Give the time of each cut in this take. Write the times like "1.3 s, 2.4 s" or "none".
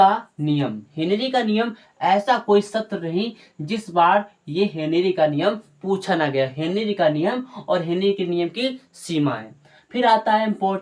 none